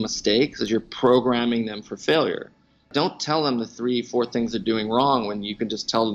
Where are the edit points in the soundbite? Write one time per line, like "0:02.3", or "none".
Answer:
0:02.9